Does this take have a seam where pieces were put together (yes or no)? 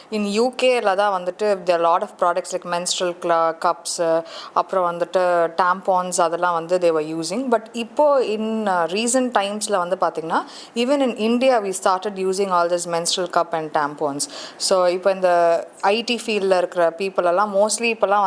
no